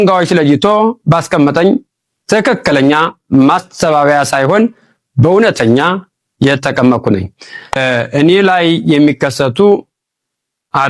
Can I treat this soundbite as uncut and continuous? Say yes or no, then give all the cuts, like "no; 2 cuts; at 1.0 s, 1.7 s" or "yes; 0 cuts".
yes; 0 cuts